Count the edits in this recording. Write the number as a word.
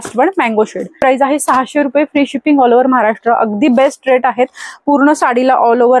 one